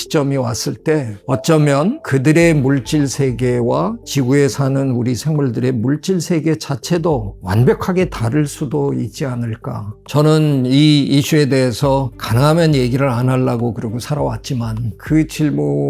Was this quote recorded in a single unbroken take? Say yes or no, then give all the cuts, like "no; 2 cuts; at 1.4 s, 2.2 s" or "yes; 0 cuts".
no; 2 cuts; at 10.0 s, 14.9 s